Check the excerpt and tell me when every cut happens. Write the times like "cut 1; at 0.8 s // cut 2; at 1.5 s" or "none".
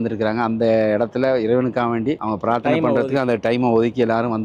none